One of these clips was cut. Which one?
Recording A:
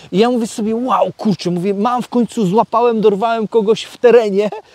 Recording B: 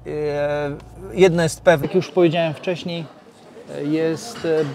B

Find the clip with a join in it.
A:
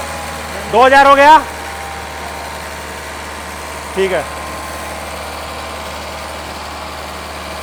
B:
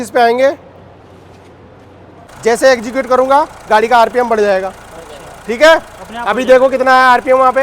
B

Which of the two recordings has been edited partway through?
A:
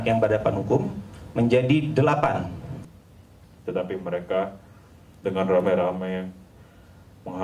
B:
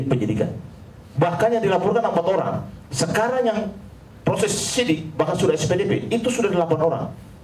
A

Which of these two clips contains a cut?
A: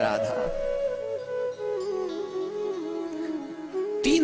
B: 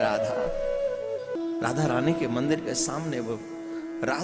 B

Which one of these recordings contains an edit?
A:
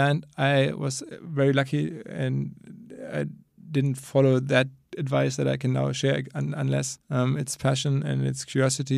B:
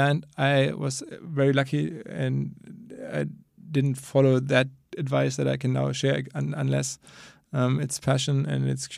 A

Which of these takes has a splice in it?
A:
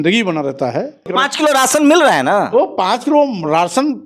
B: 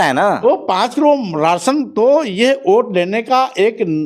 A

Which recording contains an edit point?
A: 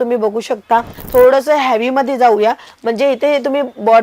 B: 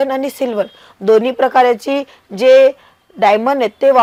A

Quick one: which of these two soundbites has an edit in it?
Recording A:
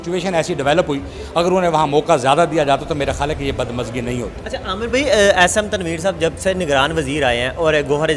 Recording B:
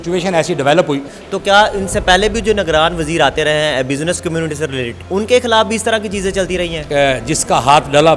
B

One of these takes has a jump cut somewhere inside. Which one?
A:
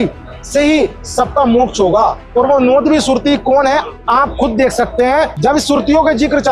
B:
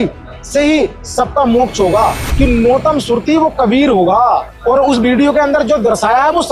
B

